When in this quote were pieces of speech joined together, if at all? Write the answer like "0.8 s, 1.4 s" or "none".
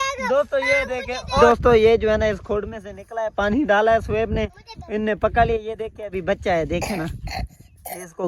1.4 s